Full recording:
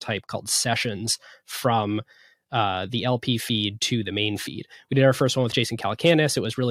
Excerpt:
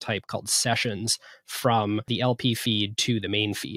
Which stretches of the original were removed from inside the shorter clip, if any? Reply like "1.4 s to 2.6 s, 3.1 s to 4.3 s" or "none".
2.1 s to 2.9 s